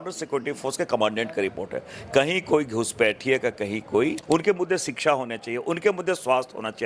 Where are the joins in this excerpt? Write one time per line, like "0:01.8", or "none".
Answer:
0:04.2